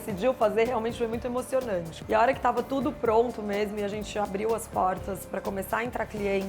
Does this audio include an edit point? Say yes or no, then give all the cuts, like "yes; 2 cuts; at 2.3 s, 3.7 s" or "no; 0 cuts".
yes; 1 cut; at 1.9 s